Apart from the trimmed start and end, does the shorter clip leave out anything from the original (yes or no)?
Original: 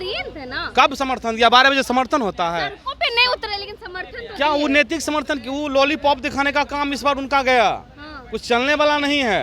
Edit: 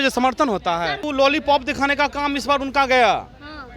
yes